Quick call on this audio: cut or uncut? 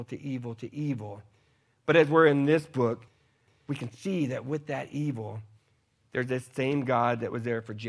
cut